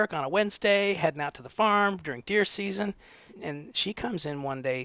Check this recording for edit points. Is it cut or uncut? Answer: cut